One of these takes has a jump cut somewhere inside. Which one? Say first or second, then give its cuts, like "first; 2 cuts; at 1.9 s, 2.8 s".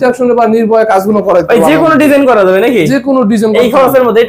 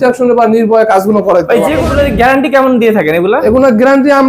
second; 1 cut; at 1.8 s